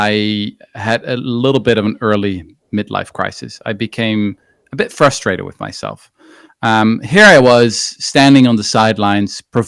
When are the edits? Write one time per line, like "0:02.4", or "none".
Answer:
none